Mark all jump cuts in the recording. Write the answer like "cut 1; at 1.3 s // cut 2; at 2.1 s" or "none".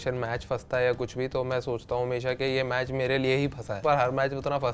cut 1; at 3.8 s